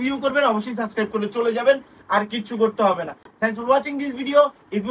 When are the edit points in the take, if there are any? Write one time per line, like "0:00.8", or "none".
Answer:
none